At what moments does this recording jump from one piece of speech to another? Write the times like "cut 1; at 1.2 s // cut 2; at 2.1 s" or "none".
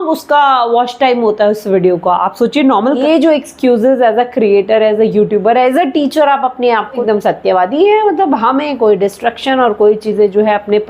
cut 1; at 3.0 s // cut 2; at 7.0 s